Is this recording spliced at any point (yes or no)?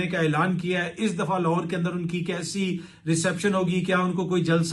no